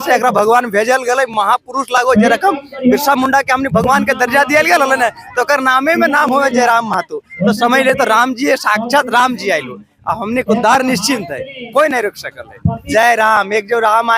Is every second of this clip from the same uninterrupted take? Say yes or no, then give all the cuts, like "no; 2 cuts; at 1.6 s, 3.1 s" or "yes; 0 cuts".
no; 1 cut; at 12.9 s